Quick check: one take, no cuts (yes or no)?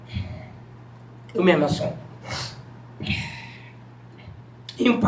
yes